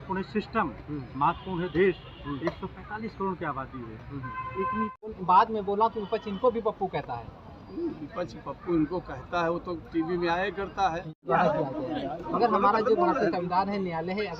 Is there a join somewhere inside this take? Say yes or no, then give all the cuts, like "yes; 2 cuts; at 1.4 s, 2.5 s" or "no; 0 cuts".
yes; 2 cuts; at 5.1 s, 11.3 s